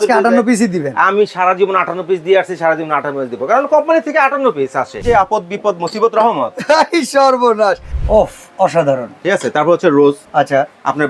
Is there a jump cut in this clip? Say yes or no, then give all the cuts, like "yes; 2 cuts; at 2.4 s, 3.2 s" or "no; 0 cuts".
yes; 3 cuts; at 5.0 s, 7.9 s, 10.2 s